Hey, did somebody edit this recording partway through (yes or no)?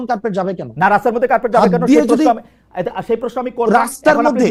no